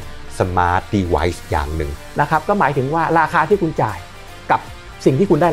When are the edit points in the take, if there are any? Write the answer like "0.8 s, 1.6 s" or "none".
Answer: 1.8 s